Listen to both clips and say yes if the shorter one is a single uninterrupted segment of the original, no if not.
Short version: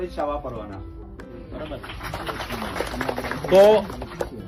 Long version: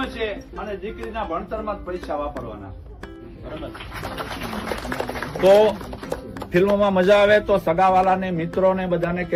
yes